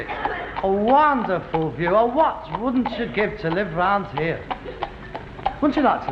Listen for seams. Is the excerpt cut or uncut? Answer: uncut